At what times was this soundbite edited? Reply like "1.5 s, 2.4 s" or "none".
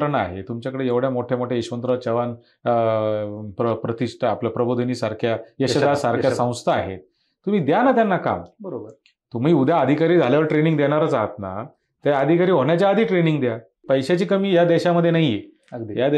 13.7 s